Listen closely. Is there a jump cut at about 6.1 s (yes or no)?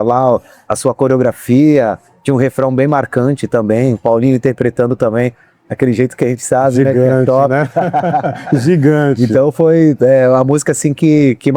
no